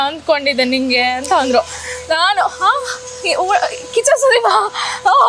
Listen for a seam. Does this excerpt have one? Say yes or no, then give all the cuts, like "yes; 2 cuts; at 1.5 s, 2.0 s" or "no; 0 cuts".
no; 0 cuts